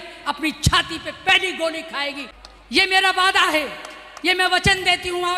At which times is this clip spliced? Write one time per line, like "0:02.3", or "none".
0:02.3